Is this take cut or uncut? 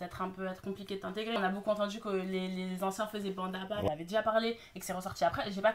cut